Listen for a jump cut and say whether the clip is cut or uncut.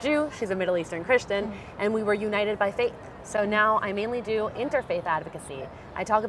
uncut